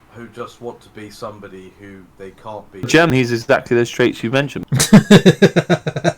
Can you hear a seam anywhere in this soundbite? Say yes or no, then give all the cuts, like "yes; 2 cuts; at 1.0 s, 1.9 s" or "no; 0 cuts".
yes; 2 cuts; at 3.1 s, 4.6 s